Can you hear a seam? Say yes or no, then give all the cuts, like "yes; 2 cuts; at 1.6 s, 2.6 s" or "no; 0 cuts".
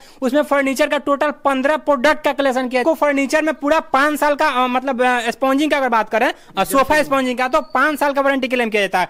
yes; 1 cut; at 2.8 s